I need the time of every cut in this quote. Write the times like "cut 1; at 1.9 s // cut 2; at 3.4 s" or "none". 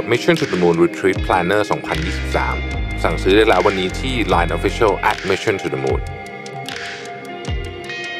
none